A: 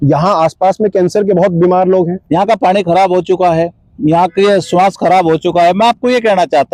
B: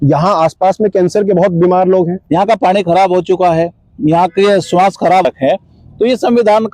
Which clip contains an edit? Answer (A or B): B